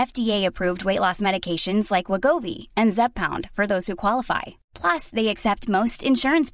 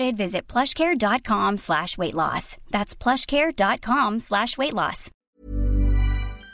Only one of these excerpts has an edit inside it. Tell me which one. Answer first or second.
second